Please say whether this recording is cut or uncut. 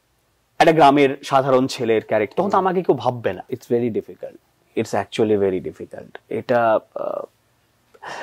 cut